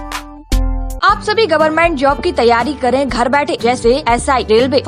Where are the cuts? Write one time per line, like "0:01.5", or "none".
0:00.9